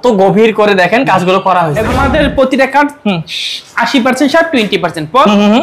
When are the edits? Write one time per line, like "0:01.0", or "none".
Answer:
0:01.8